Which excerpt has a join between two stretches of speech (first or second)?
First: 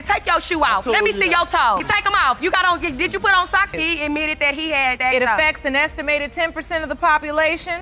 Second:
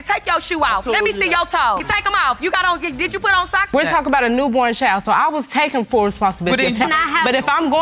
second